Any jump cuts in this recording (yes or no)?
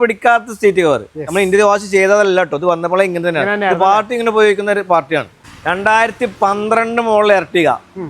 yes